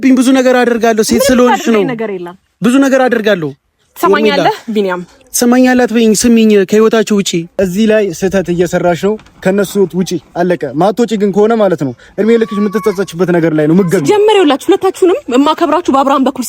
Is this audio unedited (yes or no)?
no